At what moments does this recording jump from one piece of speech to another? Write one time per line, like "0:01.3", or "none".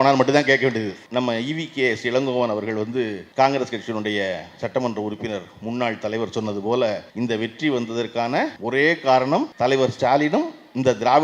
0:01.0
0:03.2
0:07.1
0:08.6
0:09.5